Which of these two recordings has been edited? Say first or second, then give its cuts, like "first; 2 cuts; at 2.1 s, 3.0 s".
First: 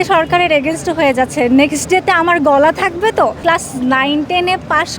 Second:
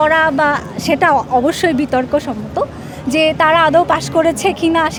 first; 1 cut; at 3.4 s